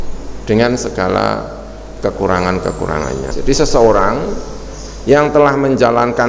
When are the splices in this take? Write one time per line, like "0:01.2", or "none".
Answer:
0:03.3